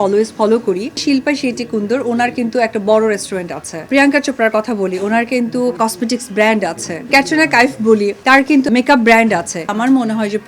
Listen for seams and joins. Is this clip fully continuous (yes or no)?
no